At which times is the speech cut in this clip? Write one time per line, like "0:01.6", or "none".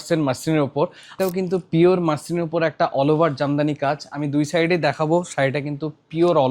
0:01.2